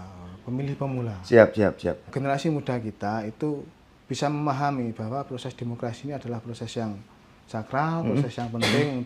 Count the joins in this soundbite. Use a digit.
1